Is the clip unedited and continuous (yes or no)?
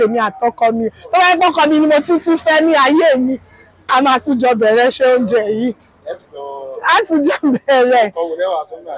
yes